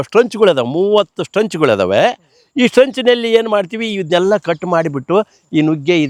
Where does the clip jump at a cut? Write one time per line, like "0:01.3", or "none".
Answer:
none